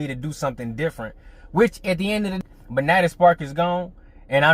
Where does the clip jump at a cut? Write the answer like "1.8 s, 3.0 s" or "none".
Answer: 2.4 s